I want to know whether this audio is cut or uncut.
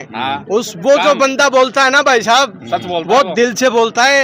uncut